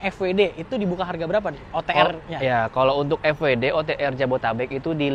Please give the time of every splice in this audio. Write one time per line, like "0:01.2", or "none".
none